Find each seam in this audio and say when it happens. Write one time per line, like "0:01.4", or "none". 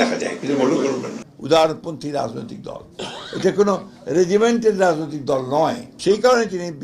0:01.2
0:05.9